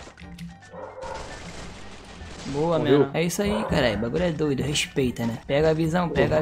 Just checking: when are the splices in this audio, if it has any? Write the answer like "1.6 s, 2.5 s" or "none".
3.1 s